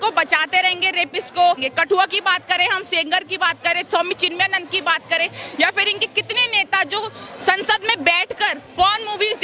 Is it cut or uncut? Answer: cut